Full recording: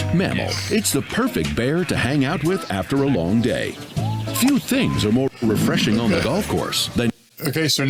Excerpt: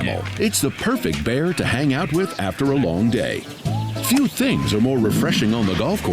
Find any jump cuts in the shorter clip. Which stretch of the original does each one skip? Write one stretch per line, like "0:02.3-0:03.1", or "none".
0:05.3-0:05.4